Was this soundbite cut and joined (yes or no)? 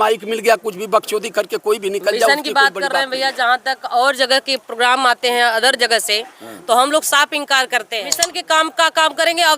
yes